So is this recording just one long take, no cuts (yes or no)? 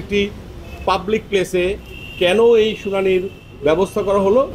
yes